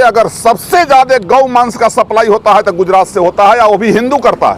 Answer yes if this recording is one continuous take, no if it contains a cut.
yes